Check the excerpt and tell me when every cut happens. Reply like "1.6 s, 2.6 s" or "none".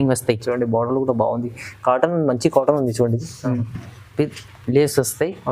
none